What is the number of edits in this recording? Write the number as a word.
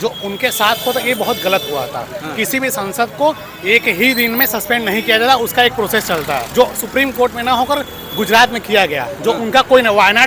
one